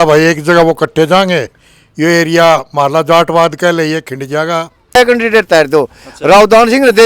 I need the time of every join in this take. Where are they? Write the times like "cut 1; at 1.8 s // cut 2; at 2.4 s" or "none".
cut 1; at 5.0 s